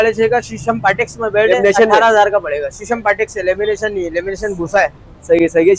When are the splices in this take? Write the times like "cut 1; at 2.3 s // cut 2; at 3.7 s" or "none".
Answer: none